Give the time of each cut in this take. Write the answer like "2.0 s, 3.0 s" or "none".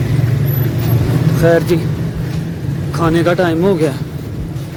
none